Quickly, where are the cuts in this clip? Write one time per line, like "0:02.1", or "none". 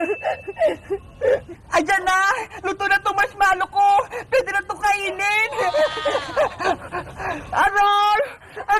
0:01.5